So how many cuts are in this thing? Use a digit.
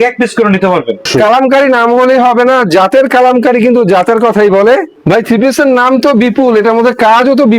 2